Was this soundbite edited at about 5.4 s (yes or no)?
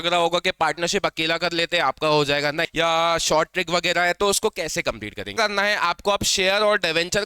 yes